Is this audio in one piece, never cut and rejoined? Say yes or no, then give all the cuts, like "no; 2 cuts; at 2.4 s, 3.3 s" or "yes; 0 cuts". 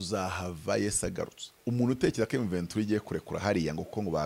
no; 1 cut; at 1.4 s